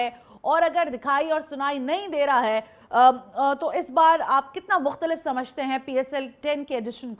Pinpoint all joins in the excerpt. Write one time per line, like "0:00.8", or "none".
none